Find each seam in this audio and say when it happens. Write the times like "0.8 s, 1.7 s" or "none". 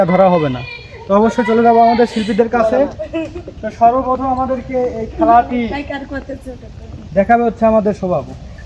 none